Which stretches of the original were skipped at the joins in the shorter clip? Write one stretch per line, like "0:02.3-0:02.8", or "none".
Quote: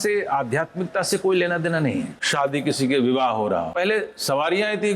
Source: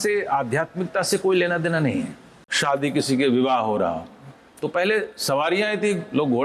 0:02.2-0:02.5
0:04.0-0:04.7